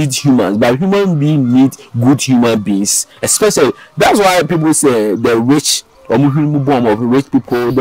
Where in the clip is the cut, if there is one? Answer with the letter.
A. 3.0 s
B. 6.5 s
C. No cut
C